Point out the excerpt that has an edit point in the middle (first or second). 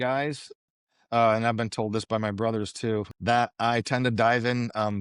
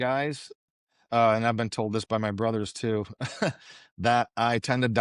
first